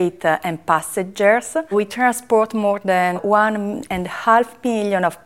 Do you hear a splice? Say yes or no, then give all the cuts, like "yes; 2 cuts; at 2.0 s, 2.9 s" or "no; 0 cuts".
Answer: yes; 2 cuts; at 1.7 s, 3.2 s